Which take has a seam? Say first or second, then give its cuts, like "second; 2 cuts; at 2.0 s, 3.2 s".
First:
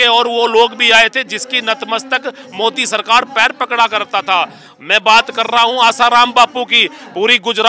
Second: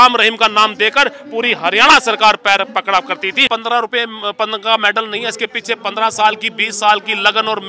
second; 1 cut; at 3.5 s